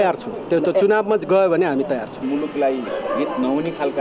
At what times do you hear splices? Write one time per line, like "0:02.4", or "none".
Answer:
0:02.2